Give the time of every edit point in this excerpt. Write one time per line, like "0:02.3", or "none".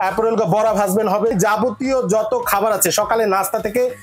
0:01.3